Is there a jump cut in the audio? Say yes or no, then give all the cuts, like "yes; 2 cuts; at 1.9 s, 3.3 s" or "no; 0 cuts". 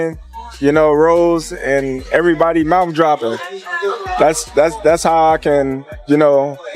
no; 0 cuts